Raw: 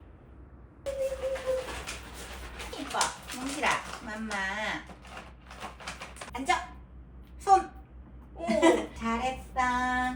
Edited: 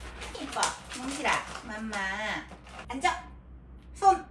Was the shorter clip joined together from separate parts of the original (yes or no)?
yes